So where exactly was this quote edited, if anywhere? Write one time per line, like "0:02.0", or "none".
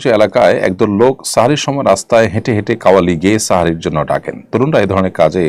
none